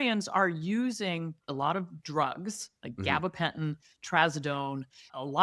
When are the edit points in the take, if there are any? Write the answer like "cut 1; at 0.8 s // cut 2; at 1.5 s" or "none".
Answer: cut 1; at 1.4 s